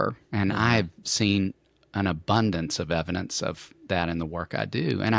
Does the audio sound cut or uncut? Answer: uncut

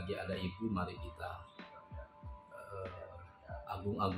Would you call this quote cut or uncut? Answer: uncut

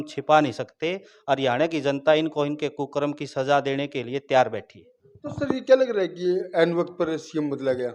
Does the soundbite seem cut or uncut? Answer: uncut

